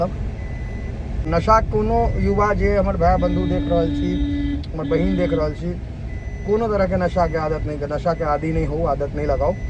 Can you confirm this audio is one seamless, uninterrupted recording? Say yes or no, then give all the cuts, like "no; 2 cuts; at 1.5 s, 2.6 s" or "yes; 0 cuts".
no; 1 cut; at 1.3 s